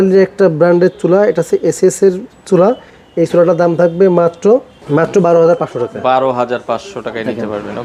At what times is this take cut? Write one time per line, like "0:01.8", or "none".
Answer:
none